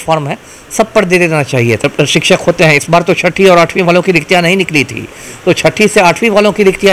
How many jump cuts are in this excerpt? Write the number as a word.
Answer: one